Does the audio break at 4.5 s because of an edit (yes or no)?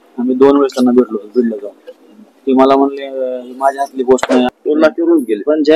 yes